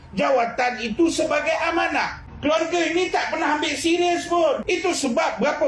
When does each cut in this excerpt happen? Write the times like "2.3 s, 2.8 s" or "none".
2.2 s, 4.6 s